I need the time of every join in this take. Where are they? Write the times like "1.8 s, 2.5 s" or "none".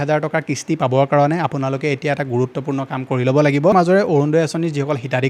3.7 s